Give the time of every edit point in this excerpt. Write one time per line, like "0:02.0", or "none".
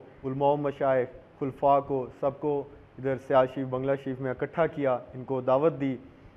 none